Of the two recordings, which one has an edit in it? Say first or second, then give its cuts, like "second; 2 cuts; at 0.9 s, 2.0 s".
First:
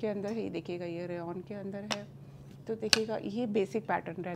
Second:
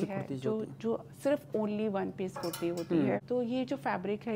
second; 1 cut; at 3.2 s